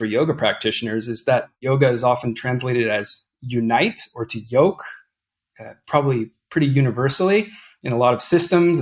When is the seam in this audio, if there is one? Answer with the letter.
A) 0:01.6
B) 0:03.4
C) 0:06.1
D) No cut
A